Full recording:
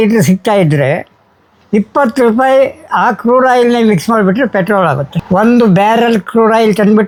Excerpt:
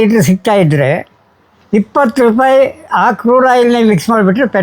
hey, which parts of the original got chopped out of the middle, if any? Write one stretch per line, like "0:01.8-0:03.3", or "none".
none